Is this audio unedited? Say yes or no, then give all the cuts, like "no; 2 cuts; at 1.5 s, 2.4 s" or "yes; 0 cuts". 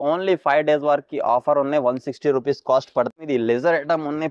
no; 1 cut; at 3.1 s